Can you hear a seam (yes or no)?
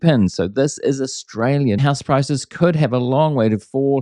yes